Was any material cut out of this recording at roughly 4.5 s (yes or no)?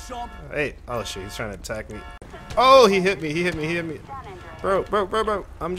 no